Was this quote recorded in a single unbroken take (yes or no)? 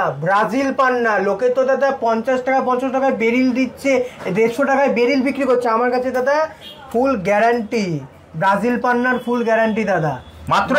yes